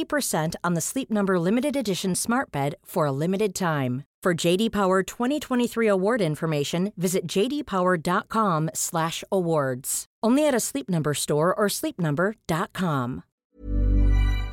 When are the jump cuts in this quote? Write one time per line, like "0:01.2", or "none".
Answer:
0:13.3